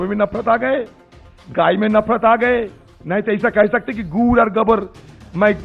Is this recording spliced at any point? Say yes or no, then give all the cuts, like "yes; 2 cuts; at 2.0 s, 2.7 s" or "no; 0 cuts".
no; 0 cuts